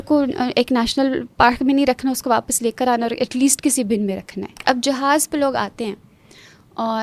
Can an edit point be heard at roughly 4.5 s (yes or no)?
yes